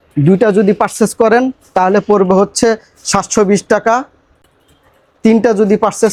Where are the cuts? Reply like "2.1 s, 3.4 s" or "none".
none